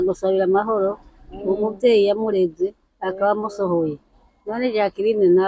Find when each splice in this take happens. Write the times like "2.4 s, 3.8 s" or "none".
none